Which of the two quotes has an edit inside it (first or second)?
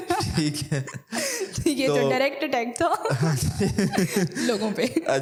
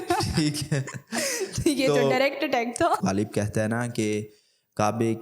second